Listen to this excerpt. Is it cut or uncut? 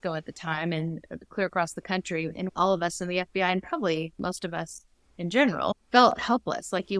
cut